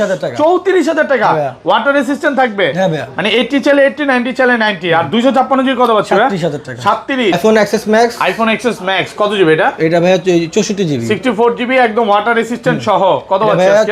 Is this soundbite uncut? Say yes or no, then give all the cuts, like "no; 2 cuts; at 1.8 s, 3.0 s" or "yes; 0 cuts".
no; 1 cut; at 7.4 s